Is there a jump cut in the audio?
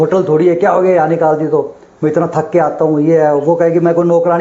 no; 0 cuts

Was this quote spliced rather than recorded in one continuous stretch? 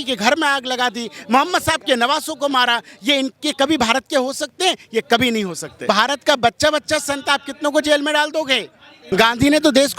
yes; 2 cuts; at 5.9 s, 9.1 s

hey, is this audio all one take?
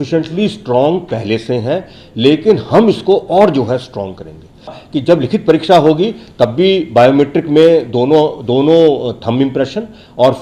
no; 1 cut; at 4.7 s

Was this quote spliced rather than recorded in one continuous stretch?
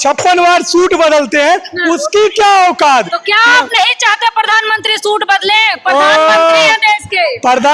no; 0 cuts

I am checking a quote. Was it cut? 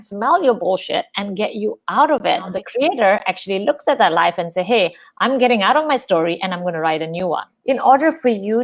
yes; 2 cuts; at 2.5 s, 7.5 s

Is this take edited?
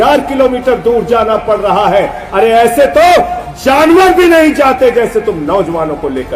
no; 0 cuts

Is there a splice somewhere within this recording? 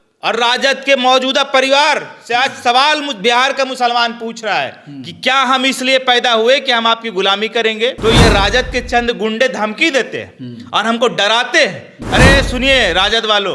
yes; 2 cuts; at 8.0 s, 11.9 s

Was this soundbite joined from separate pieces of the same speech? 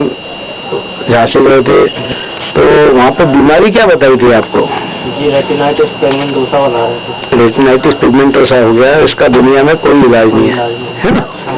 no; 0 cuts

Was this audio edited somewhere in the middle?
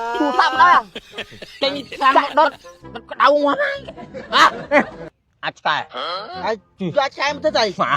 yes; 1 cut; at 5.2 s

